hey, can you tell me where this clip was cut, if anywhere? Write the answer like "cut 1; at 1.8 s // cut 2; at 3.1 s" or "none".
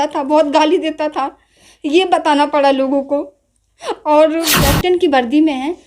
cut 1; at 4.6 s